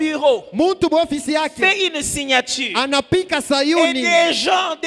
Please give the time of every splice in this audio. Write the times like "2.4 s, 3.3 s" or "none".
none